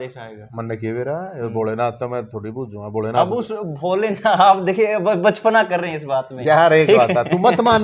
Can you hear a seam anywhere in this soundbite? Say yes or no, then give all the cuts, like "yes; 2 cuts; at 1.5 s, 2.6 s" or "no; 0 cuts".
no; 0 cuts